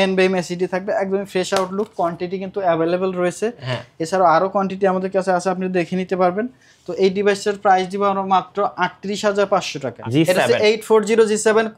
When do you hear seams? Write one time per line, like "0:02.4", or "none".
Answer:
0:09.9